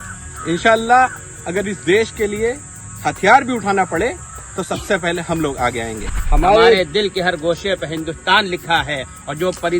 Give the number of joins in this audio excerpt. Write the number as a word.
one